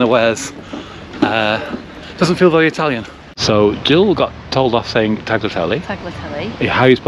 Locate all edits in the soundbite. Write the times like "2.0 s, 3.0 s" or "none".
3.5 s

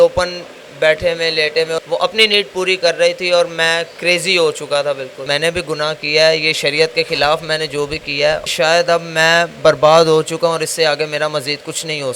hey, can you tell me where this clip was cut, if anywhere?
1.8 s, 5.2 s, 8.4 s

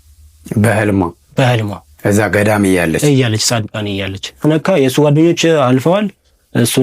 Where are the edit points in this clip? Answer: 4.4 s

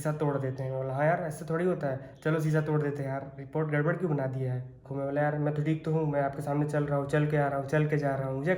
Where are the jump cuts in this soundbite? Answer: 4.9 s

